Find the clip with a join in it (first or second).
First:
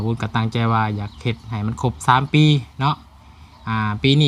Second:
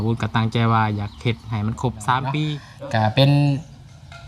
second